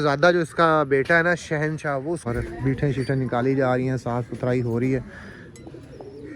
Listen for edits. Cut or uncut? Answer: cut